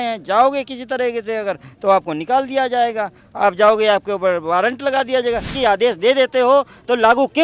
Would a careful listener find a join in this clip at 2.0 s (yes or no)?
no